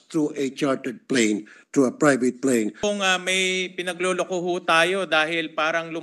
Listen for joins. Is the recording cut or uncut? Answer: cut